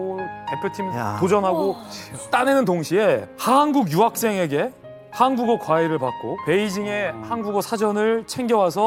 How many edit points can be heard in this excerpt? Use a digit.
0